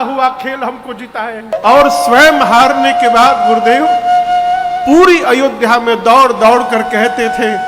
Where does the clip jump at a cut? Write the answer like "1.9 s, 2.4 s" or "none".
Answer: 1.5 s